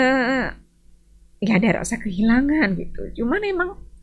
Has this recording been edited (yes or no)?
no